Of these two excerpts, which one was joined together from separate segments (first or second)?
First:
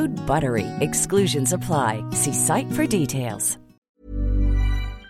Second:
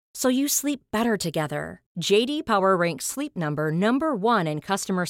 first